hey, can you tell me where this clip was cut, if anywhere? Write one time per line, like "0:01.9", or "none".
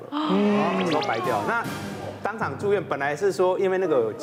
none

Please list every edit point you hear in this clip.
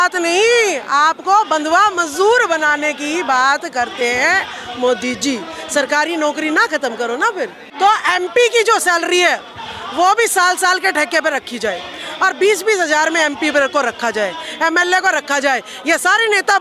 0:07.6

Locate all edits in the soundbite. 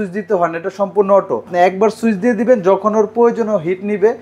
0:01.5

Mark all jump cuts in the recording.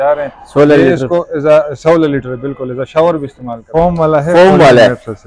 0:03.6

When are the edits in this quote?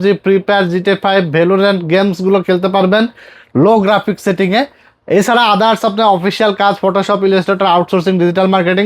none

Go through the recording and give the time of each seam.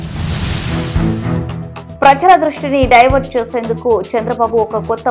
0:01.2

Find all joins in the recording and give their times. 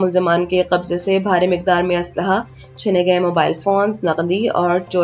none

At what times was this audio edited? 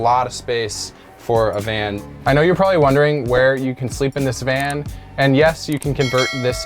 0:02.0

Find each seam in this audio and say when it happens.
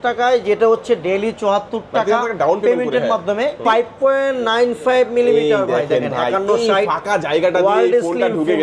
0:03.6

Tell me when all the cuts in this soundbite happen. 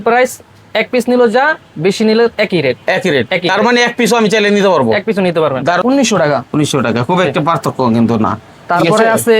0:05.8

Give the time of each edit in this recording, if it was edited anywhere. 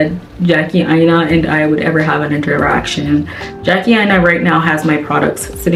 none

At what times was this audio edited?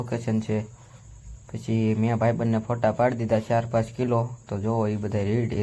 0:04.4

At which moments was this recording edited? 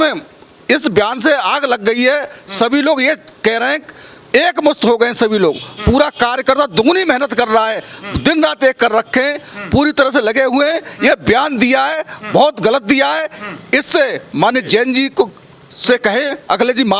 none

